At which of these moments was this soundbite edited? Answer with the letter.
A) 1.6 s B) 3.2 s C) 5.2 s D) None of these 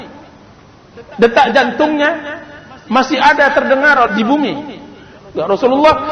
C